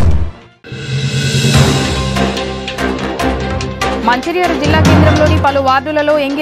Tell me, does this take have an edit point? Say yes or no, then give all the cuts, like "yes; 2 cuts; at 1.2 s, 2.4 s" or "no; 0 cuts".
yes; 1 cut; at 4.0 s